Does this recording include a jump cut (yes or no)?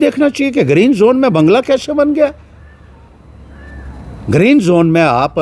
no